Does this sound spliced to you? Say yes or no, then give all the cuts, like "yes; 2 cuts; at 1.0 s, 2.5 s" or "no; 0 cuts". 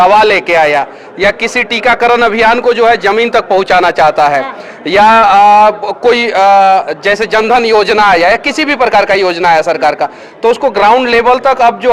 no; 0 cuts